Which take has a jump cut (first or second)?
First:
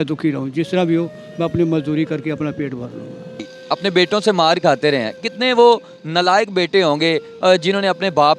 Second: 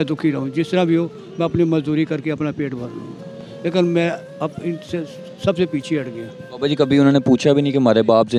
first